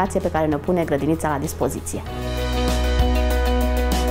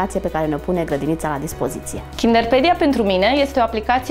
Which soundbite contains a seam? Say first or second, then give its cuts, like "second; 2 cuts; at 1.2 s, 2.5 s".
second; 1 cut; at 2.0 s